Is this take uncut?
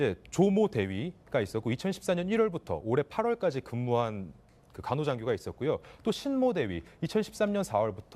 no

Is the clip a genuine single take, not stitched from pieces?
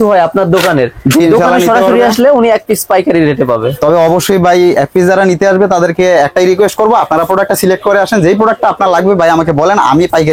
yes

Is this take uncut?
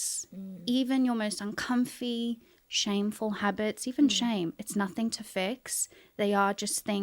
yes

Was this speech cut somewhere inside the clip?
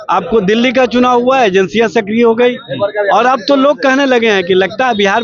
no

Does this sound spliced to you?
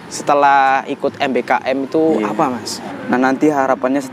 yes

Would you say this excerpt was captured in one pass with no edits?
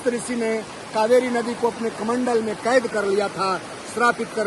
yes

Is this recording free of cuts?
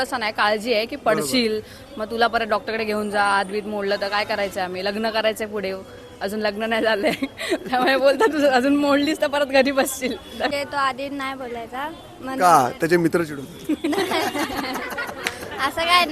no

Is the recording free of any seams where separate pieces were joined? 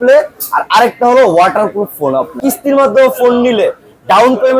no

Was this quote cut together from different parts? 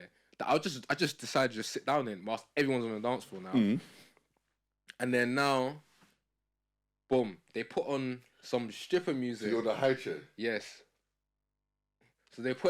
no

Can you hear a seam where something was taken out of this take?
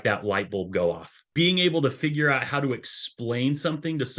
yes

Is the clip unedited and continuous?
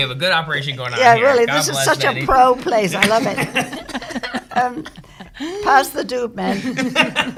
yes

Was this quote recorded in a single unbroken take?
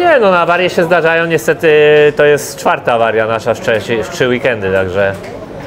yes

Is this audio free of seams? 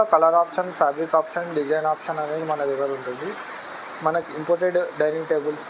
no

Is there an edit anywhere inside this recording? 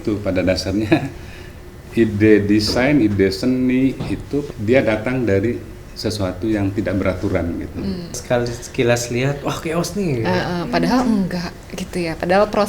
yes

